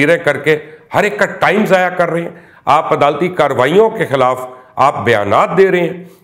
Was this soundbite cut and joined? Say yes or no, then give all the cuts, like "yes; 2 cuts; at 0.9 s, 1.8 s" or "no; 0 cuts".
no; 0 cuts